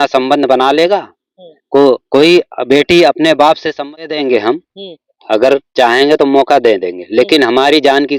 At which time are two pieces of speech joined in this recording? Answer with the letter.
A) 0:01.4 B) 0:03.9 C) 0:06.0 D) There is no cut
B